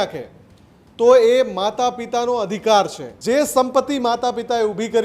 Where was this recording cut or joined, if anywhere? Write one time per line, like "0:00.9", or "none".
0:03.1